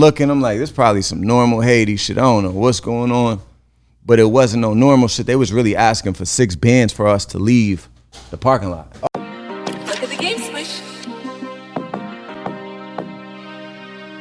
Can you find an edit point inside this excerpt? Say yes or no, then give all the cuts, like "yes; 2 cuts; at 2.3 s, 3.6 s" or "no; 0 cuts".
yes; 1 cut; at 9.1 s